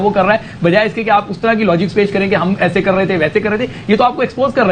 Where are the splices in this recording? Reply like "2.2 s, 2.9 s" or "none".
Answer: none